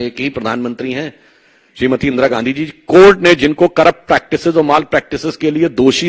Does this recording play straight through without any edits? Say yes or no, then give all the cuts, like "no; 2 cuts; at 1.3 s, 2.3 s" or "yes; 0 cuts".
yes; 0 cuts